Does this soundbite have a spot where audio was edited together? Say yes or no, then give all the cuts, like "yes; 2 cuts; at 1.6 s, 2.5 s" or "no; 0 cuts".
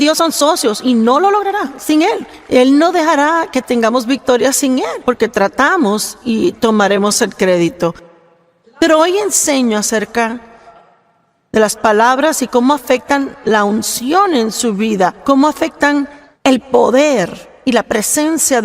yes; 1 cut; at 16.2 s